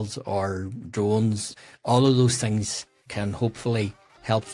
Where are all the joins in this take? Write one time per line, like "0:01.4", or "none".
0:01.5
0:03.0